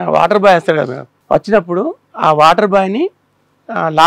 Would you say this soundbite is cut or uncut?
cut